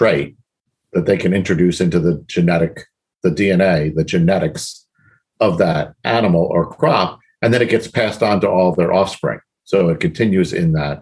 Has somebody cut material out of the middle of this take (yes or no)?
no